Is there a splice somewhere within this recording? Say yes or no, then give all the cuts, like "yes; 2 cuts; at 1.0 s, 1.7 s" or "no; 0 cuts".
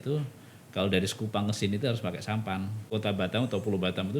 yes; 1 cut; at 2.8 s